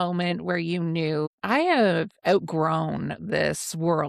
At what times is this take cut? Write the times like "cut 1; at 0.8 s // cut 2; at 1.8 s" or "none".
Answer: none